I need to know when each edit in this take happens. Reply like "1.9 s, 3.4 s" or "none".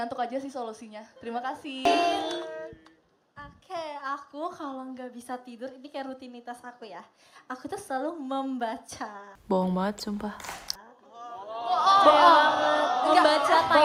none